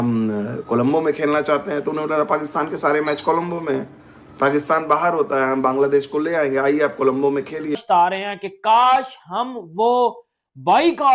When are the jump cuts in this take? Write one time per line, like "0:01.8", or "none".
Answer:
0:07.7